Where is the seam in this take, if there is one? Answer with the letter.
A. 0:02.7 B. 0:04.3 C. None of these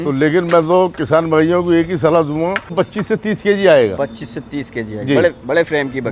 A